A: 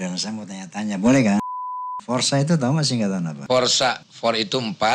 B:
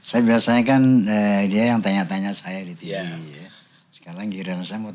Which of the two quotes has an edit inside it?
A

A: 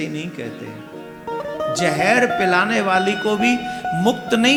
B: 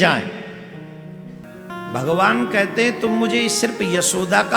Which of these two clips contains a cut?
B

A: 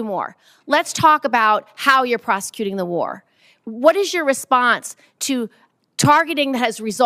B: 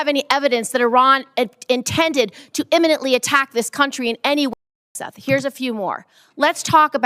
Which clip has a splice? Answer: B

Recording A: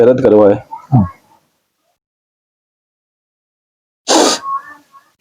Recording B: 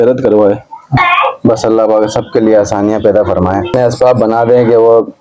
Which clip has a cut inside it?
B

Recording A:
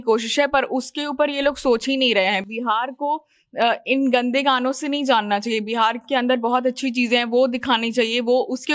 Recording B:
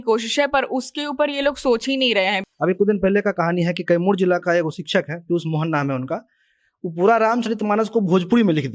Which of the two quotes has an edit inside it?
B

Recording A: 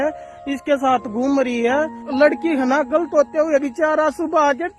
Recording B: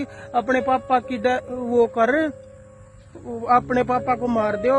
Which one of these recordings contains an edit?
A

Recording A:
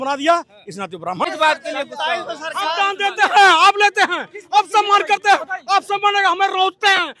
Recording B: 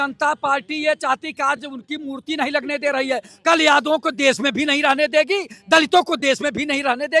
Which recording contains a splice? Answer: A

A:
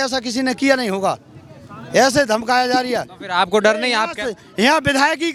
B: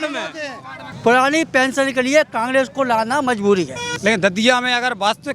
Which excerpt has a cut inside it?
B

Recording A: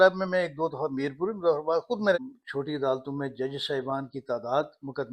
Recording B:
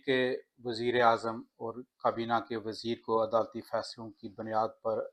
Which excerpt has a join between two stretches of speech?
A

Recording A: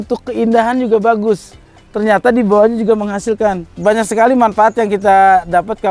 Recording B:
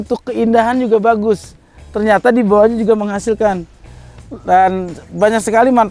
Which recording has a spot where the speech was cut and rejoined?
A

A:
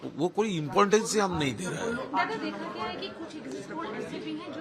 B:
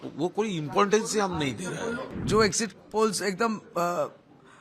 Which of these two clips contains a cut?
B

